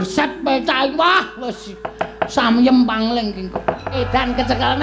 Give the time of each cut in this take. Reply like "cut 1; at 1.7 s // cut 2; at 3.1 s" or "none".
cut 1; at 3.9 s

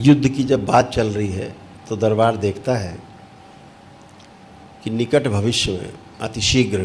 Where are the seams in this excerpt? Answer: none

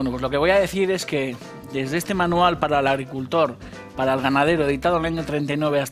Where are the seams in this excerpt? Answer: none

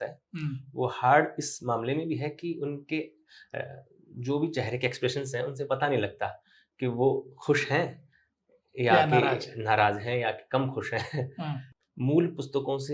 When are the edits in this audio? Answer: cut 1; at 11.7 s

